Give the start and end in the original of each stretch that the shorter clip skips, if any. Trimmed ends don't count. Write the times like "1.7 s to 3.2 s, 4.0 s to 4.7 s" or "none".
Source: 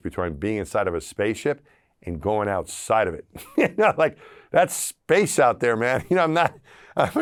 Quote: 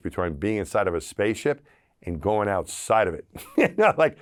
none